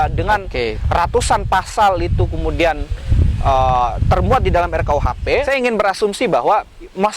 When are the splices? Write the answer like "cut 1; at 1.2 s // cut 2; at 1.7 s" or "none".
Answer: cut 1; at 5.5 s